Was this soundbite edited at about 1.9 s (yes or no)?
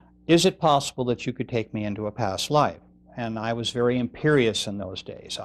yes